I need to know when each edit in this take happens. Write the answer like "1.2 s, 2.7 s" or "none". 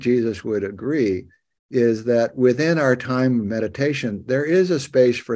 none